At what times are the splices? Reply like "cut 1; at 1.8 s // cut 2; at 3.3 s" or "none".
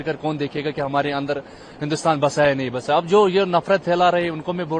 none